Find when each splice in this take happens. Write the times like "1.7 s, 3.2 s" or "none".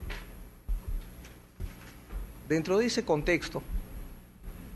2.2 s